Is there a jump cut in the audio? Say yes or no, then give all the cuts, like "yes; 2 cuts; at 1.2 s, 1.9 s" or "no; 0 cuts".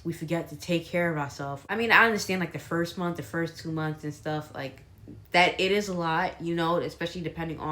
yes; 2 cuts; at 1.7 s, 3.7 s